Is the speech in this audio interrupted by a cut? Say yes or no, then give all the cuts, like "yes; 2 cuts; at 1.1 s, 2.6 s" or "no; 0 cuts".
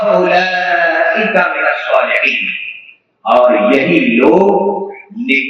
no; 0 cuts